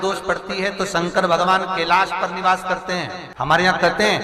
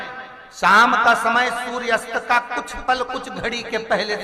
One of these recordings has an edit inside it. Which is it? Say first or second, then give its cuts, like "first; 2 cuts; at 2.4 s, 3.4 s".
first; 1 cut; at 3.3 s